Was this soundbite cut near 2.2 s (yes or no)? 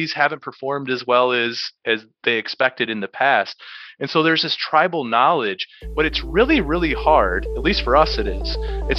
no